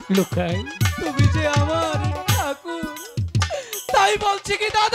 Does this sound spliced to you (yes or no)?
no